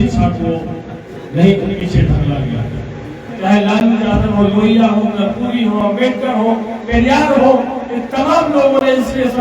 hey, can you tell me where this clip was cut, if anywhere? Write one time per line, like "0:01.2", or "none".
0:03.3